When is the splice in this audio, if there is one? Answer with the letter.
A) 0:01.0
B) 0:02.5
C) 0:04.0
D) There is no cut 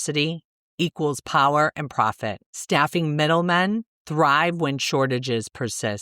B